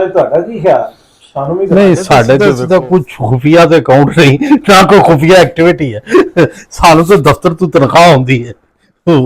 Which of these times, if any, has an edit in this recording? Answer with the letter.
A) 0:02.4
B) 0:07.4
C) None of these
A